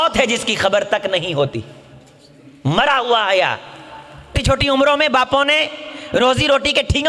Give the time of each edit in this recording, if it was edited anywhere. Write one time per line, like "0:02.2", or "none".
0:04.4